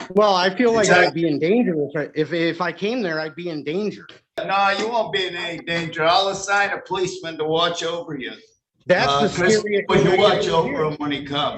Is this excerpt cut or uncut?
cut